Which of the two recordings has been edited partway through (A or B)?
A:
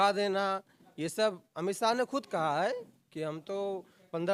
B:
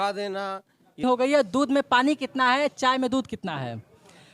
B